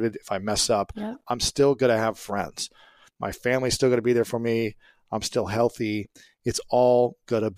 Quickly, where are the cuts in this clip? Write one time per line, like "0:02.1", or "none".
none